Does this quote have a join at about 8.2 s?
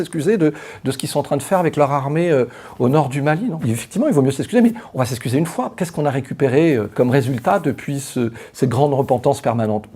no; 3 cuts; at 3.6 s, 5.7 s, 6.9 s

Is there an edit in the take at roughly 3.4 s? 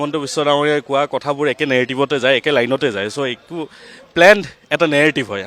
no; 0 cuts

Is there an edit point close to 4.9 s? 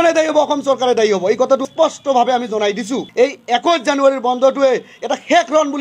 no; 2 cuts; at 1.6 s, 3.0 s

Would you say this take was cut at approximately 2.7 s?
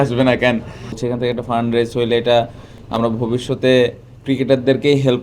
no; 1 cut; at 1.0 s

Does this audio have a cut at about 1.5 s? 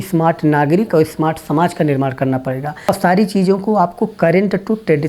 no; 1 cut; at 2.7 s

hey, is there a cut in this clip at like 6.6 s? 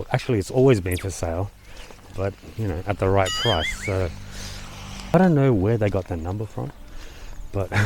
no; 1 cut; at 5.1 s

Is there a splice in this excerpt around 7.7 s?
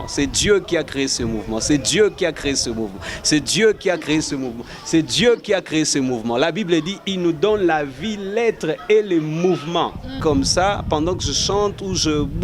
no; 1 cut; at 10.2 s

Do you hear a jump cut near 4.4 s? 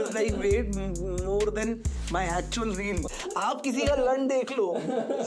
no; 1 cut; at 3.0 s

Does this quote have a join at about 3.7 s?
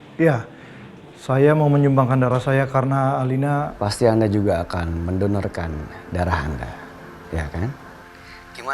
yes; 1 cut; at 3.7 s

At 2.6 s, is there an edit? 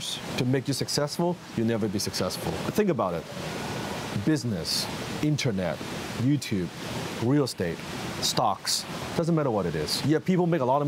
yes; 2 cuts; at 2.6 s, 10.0 s

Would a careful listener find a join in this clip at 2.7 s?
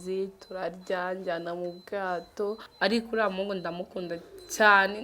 yes; 1 cut; at 2.7 s

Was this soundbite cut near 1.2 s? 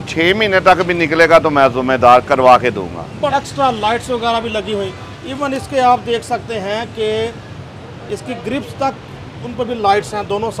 no; 1 cut; at 3.3 s

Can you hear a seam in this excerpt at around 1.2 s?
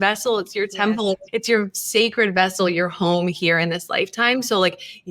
yes; 1 cut; at 1.2 s

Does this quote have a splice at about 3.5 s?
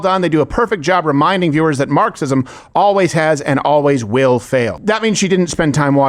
no; 1 cut; at 4.8 s

